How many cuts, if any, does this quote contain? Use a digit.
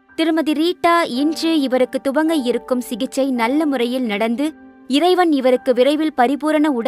0